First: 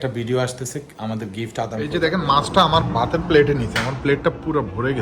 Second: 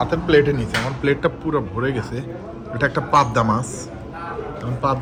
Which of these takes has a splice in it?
first; 1 cut; at 1.8 s

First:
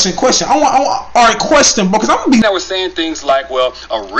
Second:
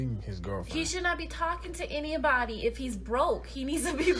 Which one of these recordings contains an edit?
first; 1 cut; at 2.4 s

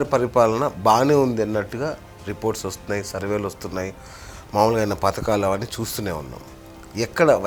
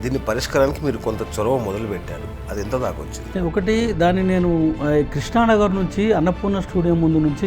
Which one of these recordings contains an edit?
second; 1 cut; at 3.1 s

